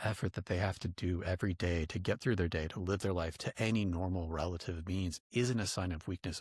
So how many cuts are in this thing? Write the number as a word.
zero